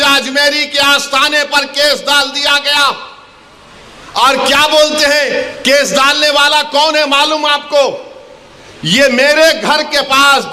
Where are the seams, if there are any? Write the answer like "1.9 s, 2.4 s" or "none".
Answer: none